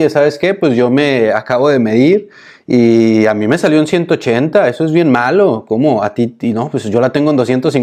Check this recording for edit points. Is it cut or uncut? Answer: uncut